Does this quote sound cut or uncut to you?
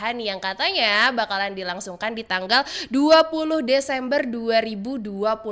uncut